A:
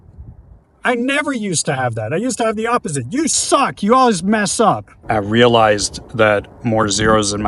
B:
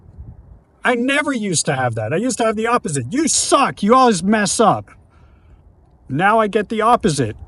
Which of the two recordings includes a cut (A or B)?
A